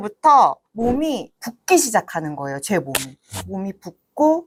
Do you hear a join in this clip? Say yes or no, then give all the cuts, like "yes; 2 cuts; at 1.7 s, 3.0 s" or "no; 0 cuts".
no; 0 cuts